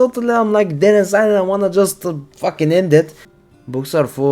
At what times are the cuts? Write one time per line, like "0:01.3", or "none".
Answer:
0:03.2

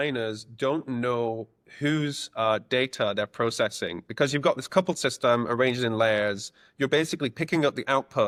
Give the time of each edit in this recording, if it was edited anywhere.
none

